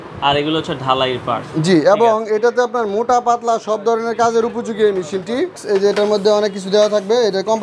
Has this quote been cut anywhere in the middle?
yes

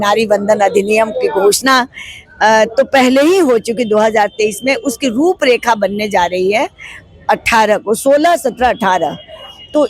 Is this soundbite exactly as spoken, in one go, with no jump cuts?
yes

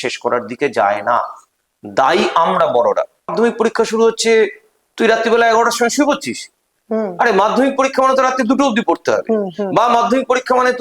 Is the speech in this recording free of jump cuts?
no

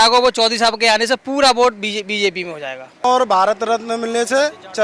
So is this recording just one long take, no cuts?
no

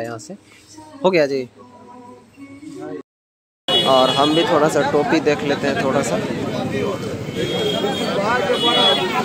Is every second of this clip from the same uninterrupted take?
no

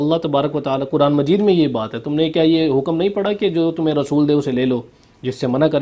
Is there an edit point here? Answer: no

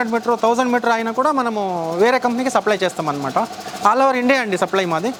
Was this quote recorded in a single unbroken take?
yes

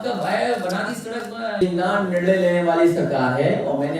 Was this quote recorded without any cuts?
no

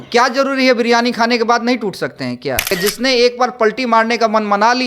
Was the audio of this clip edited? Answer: yes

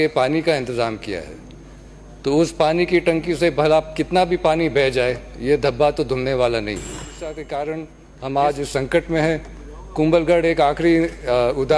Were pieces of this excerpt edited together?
yes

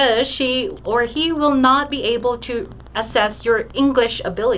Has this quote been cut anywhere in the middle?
no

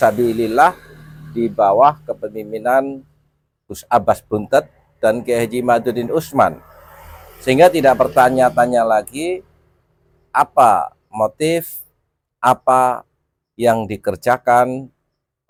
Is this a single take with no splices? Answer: yes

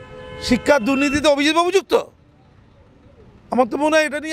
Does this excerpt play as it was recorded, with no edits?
yes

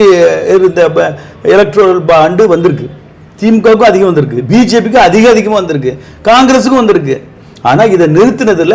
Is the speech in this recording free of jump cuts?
yes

